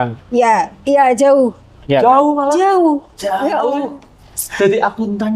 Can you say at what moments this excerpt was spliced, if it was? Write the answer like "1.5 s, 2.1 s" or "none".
none